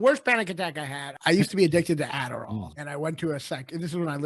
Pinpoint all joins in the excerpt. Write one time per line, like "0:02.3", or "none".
0:01.0
0:02.5